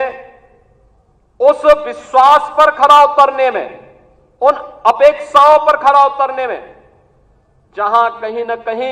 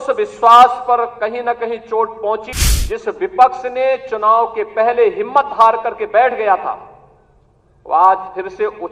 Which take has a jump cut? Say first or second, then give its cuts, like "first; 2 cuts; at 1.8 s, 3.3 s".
second; 1 cut; at 2.5 s